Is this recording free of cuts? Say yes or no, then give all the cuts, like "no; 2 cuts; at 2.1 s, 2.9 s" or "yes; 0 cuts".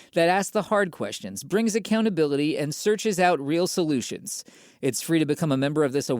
yes; 0 cuts